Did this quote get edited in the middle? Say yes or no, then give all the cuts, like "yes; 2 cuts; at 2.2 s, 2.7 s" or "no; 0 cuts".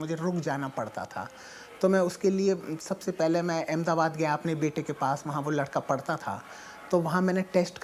no; 0 cuts